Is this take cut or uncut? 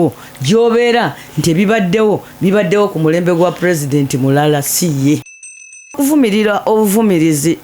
cut